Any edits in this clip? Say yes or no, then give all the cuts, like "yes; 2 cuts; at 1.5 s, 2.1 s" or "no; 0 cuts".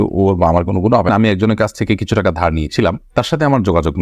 yes; 1 cut; at 1.1 s